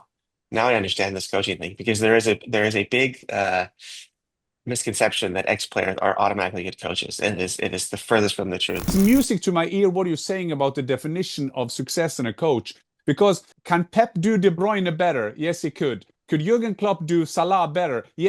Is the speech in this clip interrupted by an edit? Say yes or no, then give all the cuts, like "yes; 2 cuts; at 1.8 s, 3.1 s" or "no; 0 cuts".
yes; 2 cuts; at 8.9 s, 13.5 s